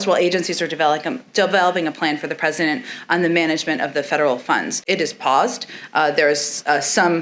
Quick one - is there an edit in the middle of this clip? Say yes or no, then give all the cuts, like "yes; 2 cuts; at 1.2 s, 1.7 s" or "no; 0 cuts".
yes; 1 cut; at 4.8 s